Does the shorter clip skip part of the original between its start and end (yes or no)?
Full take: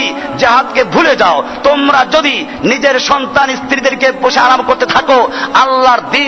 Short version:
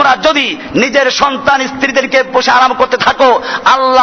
no